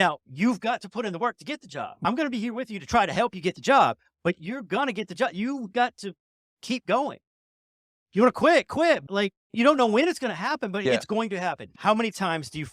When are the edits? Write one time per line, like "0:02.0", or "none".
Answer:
0:11.7